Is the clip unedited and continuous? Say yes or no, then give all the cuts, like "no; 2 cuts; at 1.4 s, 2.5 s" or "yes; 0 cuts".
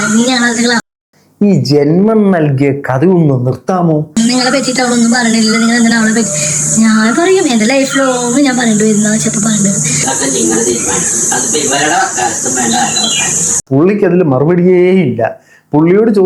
no; 2 cuts; at 4.2 s, 10.0 s